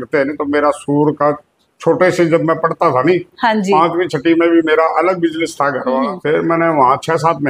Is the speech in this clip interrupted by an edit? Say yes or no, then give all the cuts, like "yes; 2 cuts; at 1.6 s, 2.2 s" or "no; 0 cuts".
yes; 1 cut; at 6.1 s